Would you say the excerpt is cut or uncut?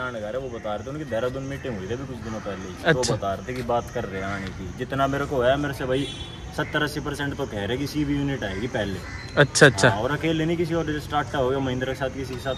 uncut